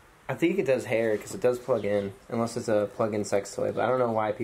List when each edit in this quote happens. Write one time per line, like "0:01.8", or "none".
none